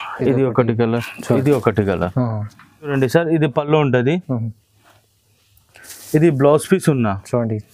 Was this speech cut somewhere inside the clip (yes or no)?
yes